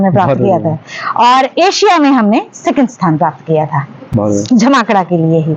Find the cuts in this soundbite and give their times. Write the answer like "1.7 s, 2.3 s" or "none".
none